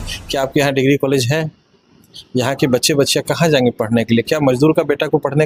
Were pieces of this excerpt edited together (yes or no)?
no